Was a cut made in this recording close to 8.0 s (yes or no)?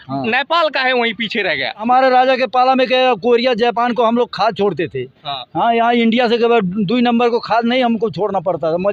no